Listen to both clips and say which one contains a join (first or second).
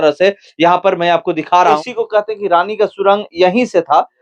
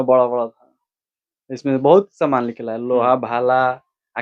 first